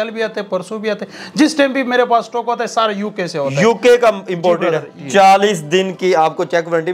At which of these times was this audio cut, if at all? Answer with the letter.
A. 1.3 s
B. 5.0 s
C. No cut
B